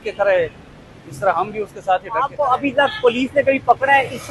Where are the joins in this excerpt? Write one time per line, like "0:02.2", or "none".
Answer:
0:02.3